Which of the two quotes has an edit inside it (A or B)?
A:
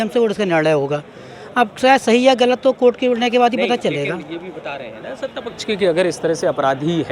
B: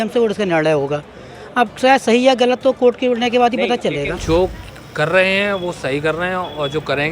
B